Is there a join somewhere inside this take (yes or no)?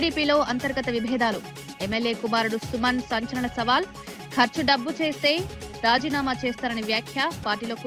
no